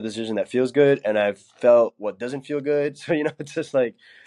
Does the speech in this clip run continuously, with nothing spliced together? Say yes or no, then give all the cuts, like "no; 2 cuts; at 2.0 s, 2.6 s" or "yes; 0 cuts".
yes; 0 cuts